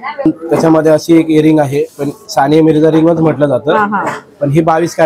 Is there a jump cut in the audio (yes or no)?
no